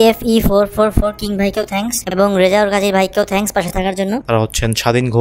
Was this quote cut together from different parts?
yes; 1 cut; at 4.2 s

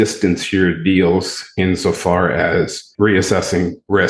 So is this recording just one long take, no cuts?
no; 1 cut; at 2.9 s

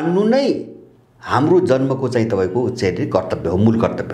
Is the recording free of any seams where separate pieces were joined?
yes; 0 cuts

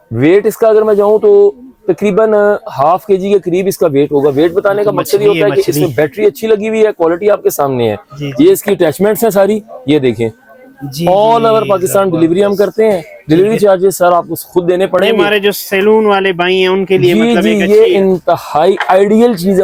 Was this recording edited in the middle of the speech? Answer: no; 0 cuts

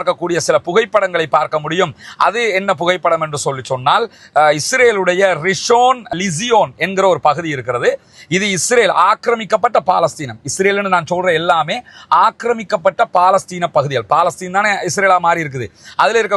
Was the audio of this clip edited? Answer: no; 0 cuts

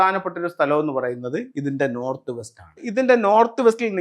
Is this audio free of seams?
no; 1 cut; at 2.8 s

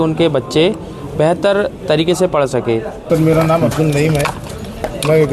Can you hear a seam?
yes; 1 cut; at 3.0 s

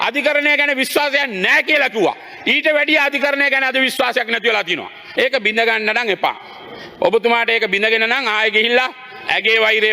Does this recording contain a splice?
yes; 1 cut; at 5.0 s

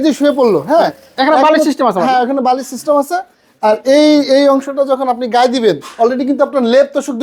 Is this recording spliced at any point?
no; 0 cuts

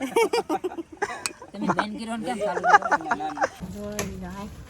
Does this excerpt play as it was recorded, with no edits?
no; 1 cut; at 3.7 s

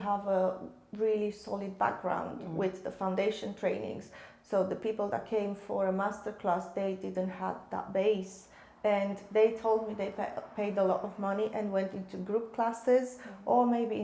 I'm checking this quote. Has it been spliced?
no; 0 cuts

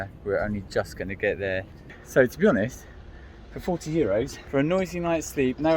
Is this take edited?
yes; 2 cuts; at 2.0 s, 4.4 s

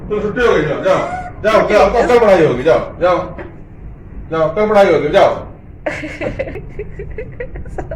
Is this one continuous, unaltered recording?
no; 1 cut; at 6.5 s

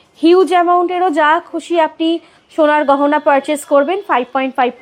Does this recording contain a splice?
no; 0 cuts

